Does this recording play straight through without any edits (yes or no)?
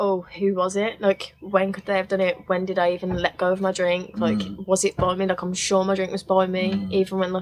yes